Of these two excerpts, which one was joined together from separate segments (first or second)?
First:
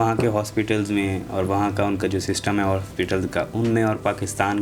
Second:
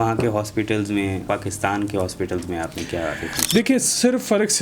second